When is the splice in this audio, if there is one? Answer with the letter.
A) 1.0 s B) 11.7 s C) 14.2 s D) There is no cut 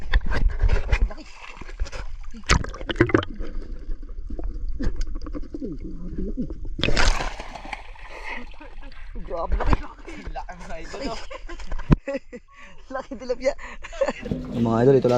C